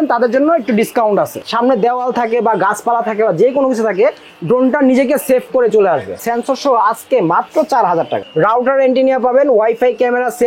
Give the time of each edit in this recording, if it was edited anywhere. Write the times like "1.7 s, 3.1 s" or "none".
1.4 s, 6.1 s, 8.2 s